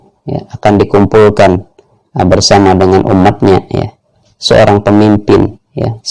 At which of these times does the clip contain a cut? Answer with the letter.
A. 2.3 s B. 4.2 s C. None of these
B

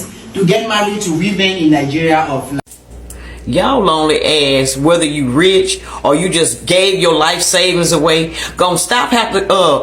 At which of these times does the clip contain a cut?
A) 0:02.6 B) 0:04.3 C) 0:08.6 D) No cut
A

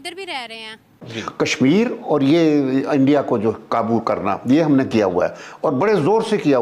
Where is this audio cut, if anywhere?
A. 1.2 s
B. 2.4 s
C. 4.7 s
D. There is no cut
A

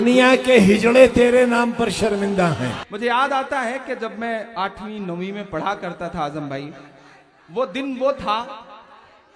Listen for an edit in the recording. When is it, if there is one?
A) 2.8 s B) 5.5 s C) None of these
A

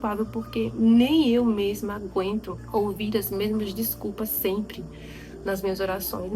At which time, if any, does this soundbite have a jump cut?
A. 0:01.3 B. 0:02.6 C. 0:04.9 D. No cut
B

